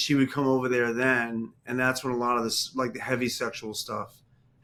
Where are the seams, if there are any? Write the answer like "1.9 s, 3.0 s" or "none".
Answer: none